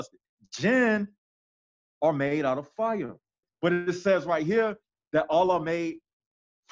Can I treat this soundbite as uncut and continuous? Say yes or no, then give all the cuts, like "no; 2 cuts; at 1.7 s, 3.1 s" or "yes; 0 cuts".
no; 1 cut; at 3.5 s